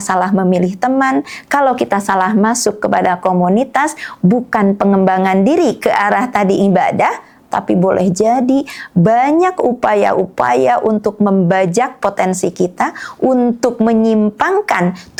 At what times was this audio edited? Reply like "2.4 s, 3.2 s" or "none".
none